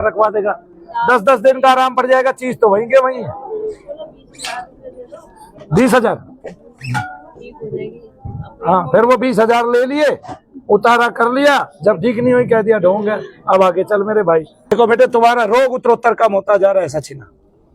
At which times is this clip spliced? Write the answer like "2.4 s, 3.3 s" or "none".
14.7 s